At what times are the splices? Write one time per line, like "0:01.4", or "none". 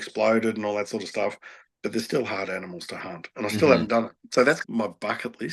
0:04.6